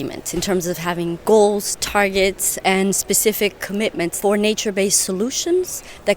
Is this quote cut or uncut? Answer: cut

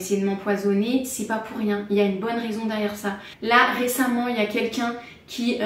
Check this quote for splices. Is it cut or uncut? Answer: uncut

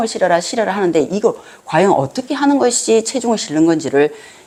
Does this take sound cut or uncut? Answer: uncut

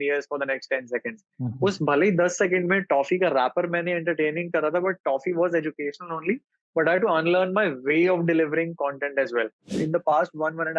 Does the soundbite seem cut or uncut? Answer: cut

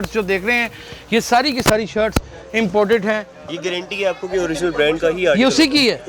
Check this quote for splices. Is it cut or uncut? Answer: cut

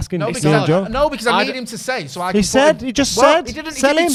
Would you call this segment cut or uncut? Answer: uncut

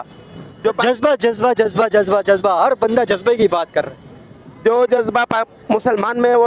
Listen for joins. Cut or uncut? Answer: uncut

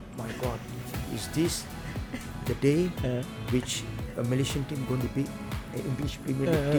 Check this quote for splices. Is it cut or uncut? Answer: uncut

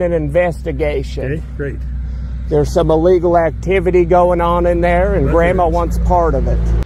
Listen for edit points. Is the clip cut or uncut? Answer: uncut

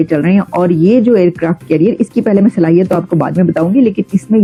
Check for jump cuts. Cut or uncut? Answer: uncut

